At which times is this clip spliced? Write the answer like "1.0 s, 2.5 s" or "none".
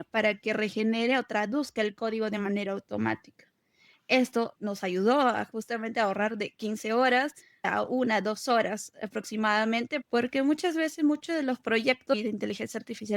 4.5 s, 7.7 s, 10.0 s, 12.1 s